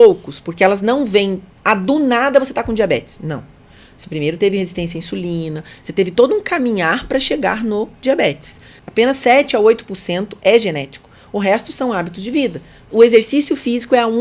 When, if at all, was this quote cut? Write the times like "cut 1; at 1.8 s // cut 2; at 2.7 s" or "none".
cut 1; at 8.8 s // cut 2; at 12.8 s